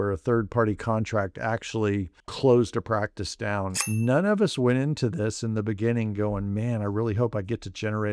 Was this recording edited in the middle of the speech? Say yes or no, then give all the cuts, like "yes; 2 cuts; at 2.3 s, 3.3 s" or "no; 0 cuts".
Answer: yes; 2 cuts; at 2.2 s, 3.8 s